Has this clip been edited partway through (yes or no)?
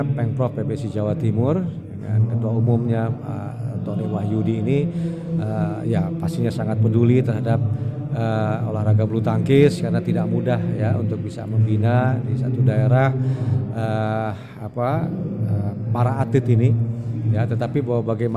no